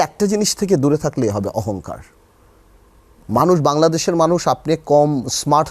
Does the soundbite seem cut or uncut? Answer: uncut